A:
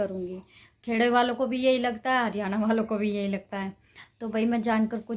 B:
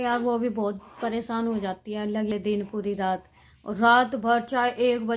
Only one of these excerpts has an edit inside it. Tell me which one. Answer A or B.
B